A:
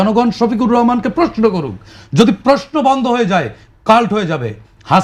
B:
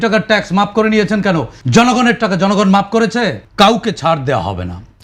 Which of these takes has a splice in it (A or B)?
B